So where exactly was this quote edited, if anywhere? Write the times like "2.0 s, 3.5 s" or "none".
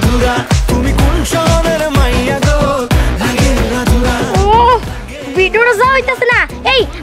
none